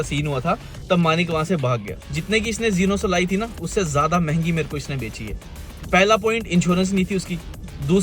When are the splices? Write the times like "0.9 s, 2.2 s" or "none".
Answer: 1.9 s